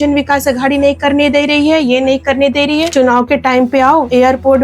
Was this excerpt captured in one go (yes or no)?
no